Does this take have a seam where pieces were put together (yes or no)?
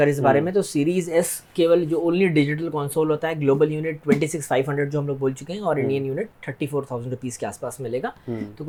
no